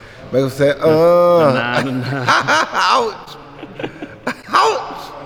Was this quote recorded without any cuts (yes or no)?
yes